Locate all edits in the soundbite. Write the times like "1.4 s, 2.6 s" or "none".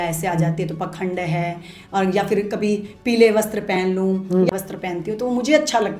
4.5 s